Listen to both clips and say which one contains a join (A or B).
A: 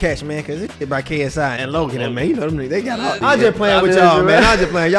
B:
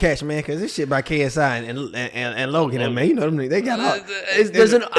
A